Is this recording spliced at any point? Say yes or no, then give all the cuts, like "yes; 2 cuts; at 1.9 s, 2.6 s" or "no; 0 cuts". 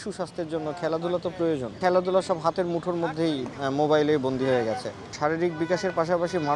yes; 2 cuts; at 1.8 s, 5.1 s